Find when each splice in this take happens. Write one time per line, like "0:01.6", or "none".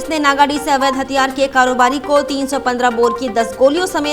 none